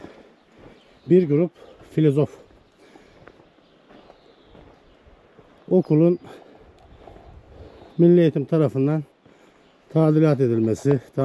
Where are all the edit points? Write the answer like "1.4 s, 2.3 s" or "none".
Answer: none